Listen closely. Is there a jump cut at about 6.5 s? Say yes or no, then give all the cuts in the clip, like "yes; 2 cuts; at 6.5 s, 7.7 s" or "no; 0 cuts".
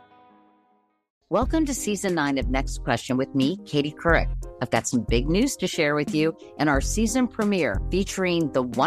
no; 1 cut; at 1.1 s